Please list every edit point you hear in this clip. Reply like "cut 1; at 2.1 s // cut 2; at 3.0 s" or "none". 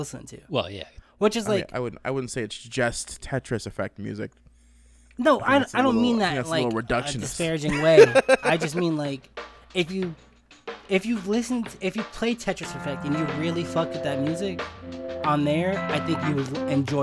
none